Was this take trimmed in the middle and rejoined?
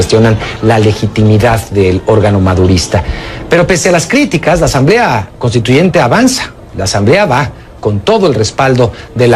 no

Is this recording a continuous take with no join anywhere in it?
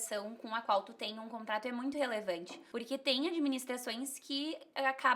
no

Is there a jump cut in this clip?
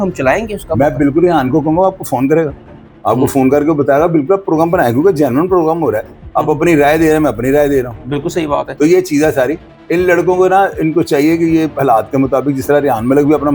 no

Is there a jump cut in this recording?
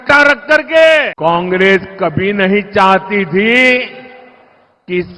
yes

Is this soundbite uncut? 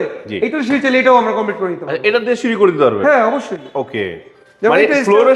yes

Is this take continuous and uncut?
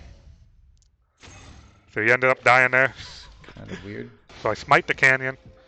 no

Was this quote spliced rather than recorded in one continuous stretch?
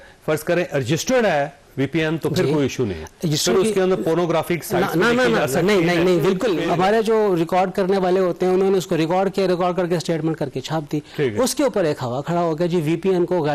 yes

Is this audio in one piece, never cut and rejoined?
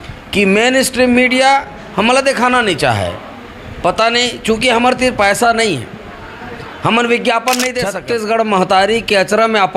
no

